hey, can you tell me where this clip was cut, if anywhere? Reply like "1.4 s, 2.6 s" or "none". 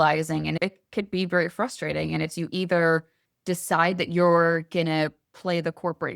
none